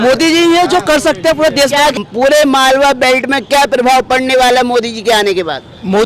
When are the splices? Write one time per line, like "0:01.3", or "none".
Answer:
0:01.9